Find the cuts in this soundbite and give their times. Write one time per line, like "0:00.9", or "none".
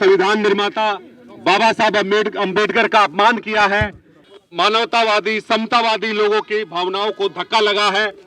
0:04.3